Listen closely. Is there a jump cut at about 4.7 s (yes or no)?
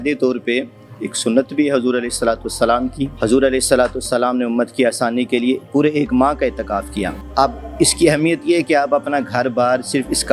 no